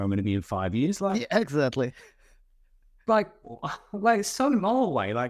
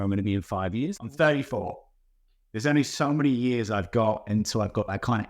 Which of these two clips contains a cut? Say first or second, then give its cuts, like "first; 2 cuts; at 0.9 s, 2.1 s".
second; 1 cut; at 0.9 s